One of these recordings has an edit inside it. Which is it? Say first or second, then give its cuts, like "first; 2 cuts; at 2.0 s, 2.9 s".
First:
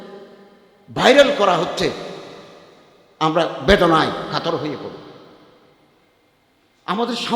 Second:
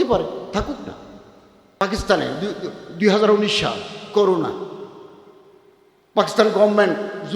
second; 1 cut; at 1.8 s